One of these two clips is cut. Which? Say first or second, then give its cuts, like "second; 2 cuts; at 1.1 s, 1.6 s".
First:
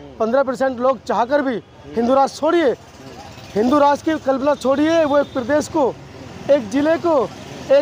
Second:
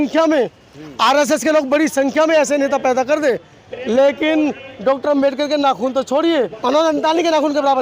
second; 1 cut; at 6.6 s